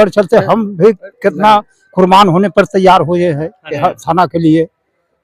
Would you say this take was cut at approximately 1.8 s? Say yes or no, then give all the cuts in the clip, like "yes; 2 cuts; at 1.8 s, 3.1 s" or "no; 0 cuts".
no; 0 cuts